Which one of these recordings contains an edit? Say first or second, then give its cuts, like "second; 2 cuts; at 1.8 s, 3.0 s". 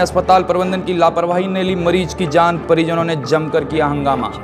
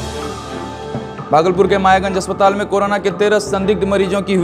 second; 1 cut; at 1.2 s